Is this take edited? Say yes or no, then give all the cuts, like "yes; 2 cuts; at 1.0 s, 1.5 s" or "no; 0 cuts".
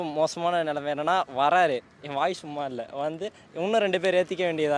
no; 0 cuts